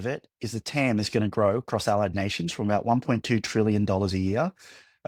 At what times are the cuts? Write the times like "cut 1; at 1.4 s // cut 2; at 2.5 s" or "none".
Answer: none